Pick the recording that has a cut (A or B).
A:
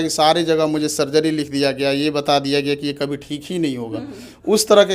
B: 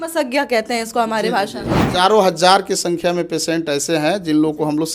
B